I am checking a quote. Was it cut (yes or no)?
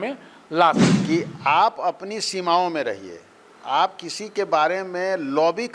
yes